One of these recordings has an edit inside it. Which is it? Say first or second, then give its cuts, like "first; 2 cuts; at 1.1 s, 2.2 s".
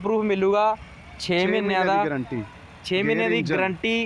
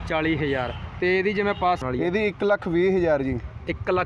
second; 1 cut; at 1.8 s